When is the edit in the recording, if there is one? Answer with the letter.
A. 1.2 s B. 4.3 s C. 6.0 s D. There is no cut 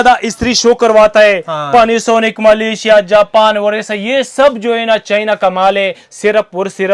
C